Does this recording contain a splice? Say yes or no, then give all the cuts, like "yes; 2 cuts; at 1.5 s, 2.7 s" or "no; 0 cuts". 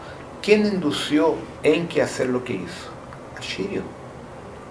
yes; 1 cut; at 1.5 s